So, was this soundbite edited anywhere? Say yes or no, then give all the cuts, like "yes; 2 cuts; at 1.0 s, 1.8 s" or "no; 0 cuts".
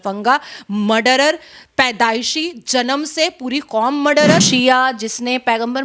yes; 1 cut; at 4.4 s